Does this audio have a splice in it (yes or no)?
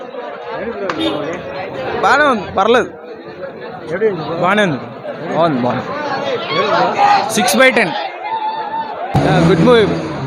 yes